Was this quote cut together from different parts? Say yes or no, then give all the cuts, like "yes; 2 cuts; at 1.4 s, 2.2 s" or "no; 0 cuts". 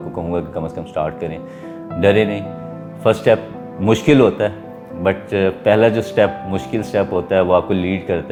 no; 0 cuts